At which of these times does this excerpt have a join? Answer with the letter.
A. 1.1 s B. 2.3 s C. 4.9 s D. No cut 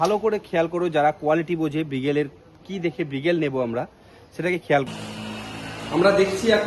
C